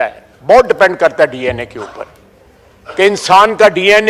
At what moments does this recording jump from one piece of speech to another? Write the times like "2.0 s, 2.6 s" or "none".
none